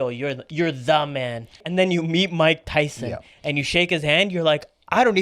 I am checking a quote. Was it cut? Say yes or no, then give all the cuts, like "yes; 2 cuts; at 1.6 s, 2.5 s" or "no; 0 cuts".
yes; 1 cut; at 1.6 s